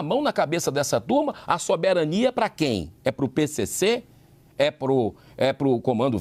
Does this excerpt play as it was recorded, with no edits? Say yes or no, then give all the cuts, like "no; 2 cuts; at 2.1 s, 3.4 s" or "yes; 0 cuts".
yes; 0 cuts